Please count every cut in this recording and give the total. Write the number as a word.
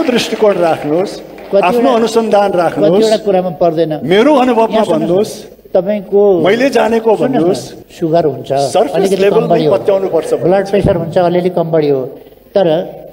two